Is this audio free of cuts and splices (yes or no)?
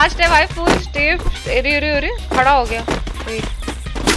yes